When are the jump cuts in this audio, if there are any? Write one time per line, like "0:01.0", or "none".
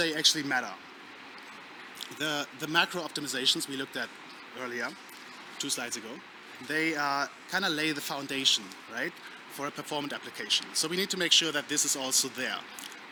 none